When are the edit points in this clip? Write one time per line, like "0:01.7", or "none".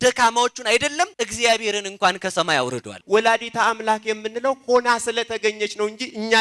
0:01.1
0:02.9